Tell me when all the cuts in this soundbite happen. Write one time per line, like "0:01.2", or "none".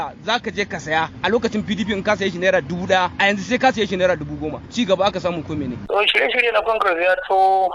0:01.1
0:03.1
0:04.6
0:05.8